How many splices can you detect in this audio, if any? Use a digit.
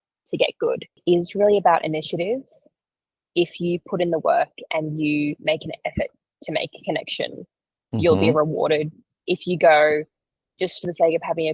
1